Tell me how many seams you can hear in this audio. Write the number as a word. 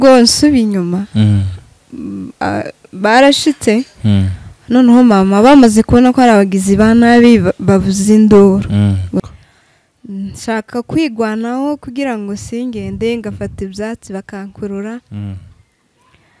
one